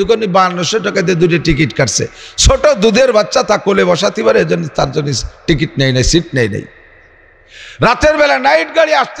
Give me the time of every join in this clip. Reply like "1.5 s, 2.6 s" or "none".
none